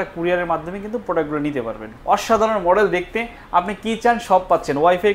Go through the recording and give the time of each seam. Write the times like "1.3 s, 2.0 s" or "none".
1.9 s